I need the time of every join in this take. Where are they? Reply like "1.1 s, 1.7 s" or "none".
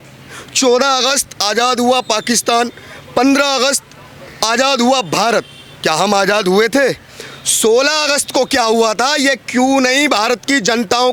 none